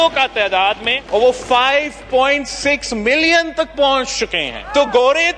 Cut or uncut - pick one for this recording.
uncut